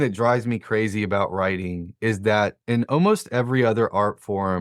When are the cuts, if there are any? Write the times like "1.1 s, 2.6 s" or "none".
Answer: 2.6 s